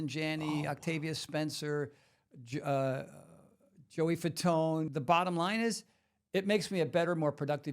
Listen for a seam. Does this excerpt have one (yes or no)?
yes